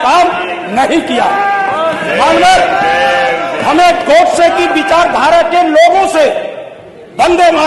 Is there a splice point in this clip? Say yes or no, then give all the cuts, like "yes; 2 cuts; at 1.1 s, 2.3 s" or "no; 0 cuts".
no; 0 cuts